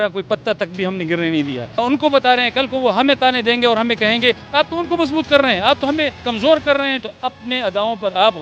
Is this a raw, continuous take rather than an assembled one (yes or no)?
no